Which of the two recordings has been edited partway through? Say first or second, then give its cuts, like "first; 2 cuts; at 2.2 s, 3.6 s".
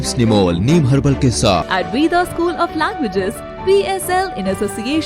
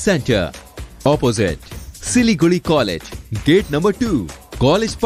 first; 1 cut; at 1.7 s